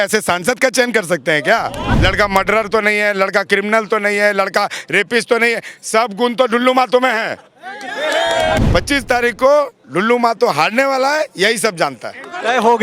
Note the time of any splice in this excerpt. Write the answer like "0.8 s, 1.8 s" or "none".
1.9 s, 8.6 s

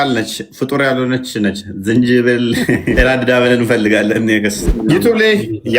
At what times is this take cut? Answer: 3.0 s, 4.7 s

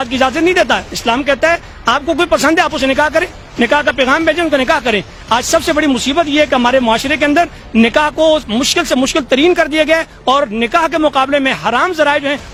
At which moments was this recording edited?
none

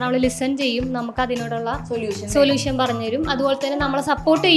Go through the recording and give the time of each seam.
none

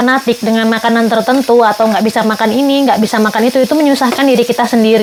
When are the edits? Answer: none

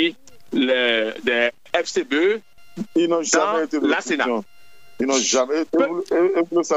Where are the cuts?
1.6 s, 2.5 s

